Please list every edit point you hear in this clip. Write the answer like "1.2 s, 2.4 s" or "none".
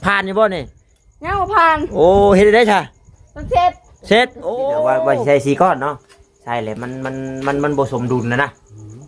5.0 s